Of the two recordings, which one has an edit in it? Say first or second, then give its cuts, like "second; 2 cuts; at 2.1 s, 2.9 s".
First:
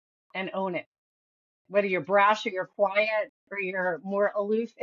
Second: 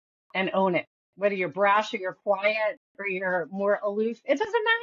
second; 1 cut; at 1.0 s